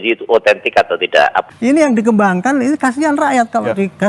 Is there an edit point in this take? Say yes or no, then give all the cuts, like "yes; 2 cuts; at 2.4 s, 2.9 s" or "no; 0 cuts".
yes; 1 cut; at 1.4 s